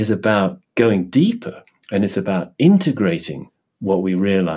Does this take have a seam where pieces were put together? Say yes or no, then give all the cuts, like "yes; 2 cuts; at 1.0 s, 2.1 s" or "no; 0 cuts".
no; 0 cuts